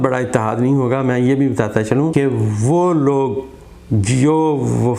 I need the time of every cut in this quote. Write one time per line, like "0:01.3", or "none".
0:02.1